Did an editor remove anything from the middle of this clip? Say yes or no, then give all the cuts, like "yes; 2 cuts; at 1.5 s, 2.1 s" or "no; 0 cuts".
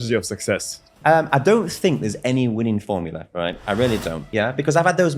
yes; 2 cuts; at 0.9 s, 4.2 s